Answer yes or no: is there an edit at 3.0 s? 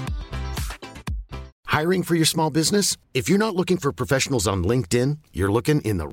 no